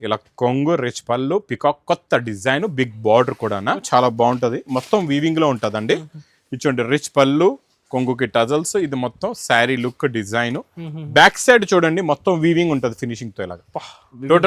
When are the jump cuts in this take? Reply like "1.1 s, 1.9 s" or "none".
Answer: 3.8 s